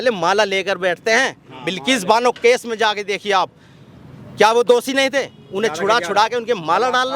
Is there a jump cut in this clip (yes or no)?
no